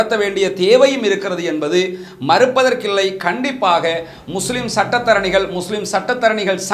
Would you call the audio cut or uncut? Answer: uncut